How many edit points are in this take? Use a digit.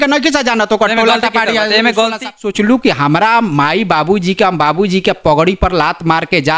1